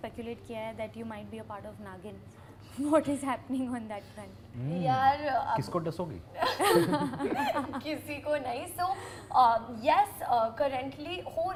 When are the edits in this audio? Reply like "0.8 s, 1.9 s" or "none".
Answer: none